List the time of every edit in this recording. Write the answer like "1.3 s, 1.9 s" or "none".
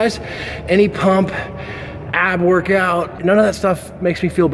3.2 s